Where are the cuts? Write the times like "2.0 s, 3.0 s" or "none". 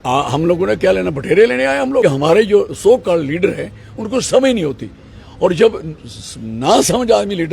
2.0 s